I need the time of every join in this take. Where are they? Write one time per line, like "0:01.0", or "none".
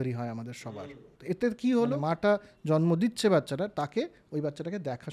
0:01.1
0:02.0